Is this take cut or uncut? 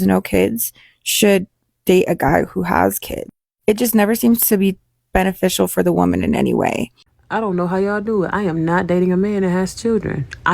cut